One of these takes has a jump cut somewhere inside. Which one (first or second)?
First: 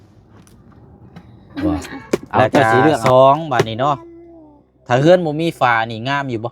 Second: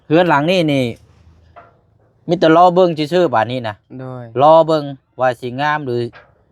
first